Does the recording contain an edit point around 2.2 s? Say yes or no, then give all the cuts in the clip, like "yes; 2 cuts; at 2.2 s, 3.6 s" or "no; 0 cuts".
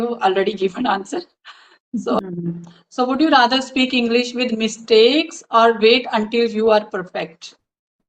yes; 1 cut; at 2.2 s